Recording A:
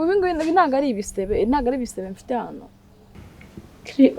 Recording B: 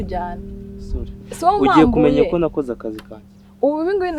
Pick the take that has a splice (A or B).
A